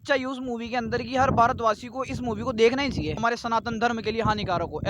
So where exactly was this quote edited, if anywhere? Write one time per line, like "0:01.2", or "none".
0:03.2